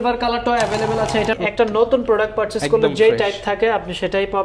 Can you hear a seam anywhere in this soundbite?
yes; 1 cut; at 1.4 s

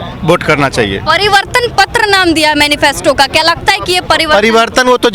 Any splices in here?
no; 0 cuts

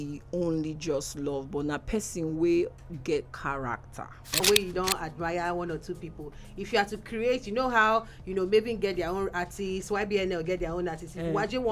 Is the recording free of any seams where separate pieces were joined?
no; 1 cut; at 4.4 s

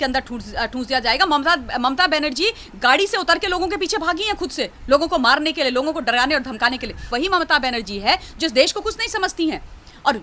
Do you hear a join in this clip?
no; 0 cuts

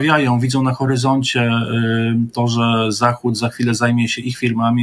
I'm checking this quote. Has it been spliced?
no; 0 cuts

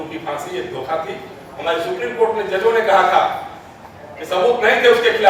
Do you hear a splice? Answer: no; 0 cuts

